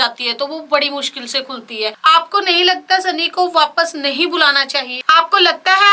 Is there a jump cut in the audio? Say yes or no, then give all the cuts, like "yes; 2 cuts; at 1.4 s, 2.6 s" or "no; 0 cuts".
yes; 2 cuts; at 1.9 s, 5.0 s